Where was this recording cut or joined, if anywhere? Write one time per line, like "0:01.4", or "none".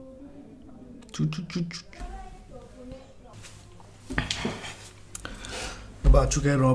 0:03.3